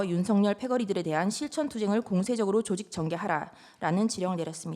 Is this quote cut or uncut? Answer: uncut